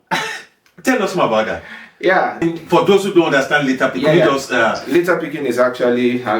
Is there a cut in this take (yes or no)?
yes